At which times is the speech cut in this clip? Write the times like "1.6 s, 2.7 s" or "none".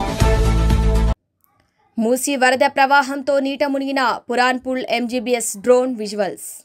1.2 s